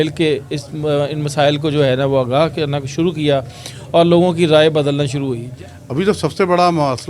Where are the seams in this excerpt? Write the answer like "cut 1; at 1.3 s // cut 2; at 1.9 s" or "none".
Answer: cut 1; at 5.4 s